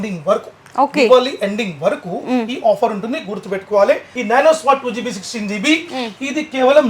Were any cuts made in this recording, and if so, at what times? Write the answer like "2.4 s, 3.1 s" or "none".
4.1 s